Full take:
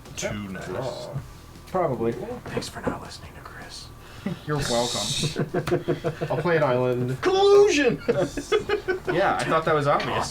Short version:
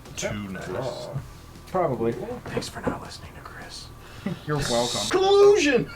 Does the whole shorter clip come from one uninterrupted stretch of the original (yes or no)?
no